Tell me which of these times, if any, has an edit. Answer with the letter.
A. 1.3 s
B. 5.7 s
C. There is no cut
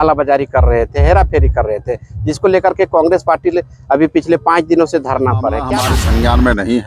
B